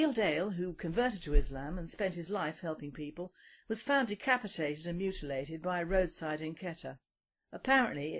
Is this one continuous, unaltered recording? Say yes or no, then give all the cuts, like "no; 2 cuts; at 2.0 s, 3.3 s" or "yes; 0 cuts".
no; 1 cut; at 4.5 s